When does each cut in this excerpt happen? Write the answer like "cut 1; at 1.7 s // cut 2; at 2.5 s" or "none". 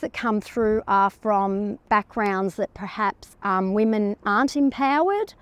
cut 1; at 1.8 s // cut 2; at 3.3 s